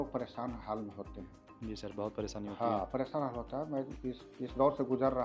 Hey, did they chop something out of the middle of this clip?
no; 0 cuts

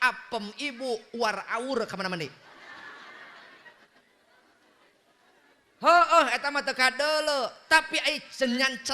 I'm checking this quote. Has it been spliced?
no; 0 cuts

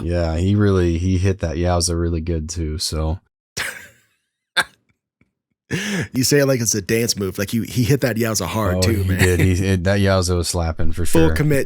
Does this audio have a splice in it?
yes; 1 cut; at 6.1 s

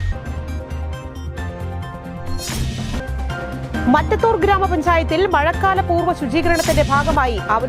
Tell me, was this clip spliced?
no; 0 cuts

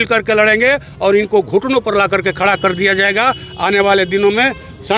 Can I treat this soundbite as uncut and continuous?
yes; 0 cuts

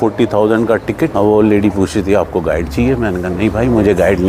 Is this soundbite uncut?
no; 1 cut; at 1.1 s

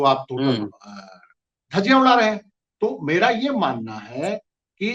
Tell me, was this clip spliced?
no; 0 cuts

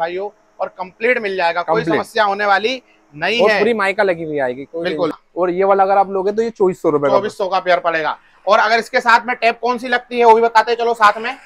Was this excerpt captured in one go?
no; 1 cut; at 5.2 s

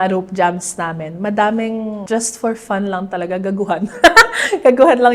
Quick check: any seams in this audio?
yes; 1 cut; at 2.0 s

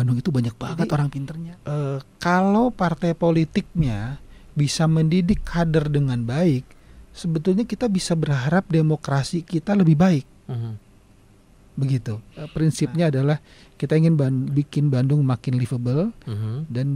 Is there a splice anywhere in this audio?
yes; 2 cuts; at 1.2 s, 12.6 s

